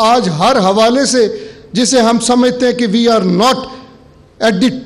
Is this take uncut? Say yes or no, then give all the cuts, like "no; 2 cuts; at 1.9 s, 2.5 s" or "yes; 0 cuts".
yes; 0 cuts